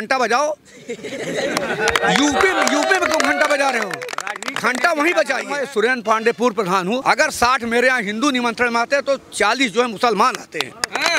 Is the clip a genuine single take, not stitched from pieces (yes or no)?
no